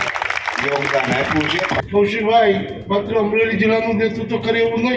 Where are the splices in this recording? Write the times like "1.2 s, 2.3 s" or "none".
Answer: 1.8 s